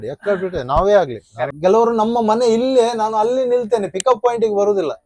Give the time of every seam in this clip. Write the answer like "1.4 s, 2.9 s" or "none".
1.5 s